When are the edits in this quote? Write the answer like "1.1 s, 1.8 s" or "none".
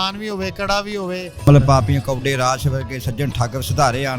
1.3 s